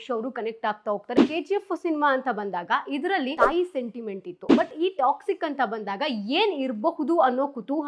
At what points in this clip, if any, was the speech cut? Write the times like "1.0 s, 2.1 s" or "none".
1.2 s, 3.3 s